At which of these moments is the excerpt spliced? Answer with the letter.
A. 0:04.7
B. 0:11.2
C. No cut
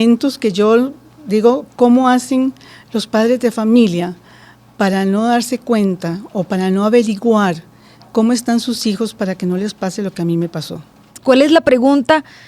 B